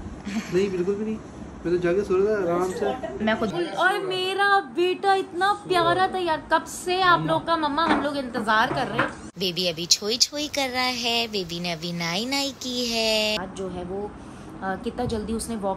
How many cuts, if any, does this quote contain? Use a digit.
3